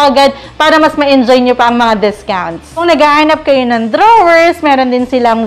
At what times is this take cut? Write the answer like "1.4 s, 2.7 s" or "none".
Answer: 2.7 s